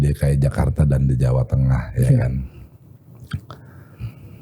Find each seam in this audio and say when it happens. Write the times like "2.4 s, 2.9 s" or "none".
none